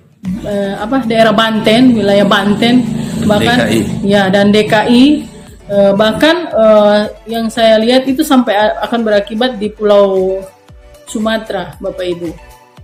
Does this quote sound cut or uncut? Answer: uncut